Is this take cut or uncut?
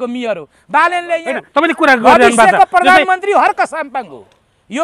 cut